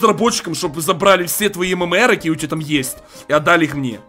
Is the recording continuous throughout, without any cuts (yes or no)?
yes